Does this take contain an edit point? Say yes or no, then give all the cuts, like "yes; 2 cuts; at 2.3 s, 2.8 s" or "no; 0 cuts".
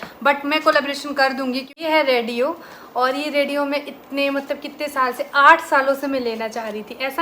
yes; 1 cut; at 1.8 s